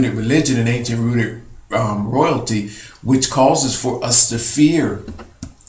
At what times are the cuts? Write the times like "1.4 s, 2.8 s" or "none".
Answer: none

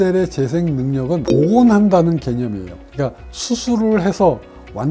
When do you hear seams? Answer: 1.4 s

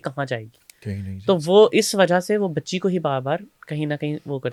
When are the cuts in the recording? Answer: none

